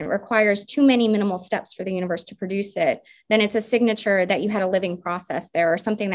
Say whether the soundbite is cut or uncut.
uncut